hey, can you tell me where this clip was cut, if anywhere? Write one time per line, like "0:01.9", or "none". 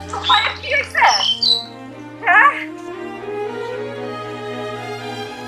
0:02.6